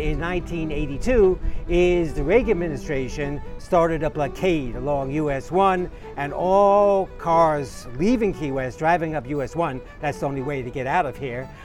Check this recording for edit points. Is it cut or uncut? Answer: cut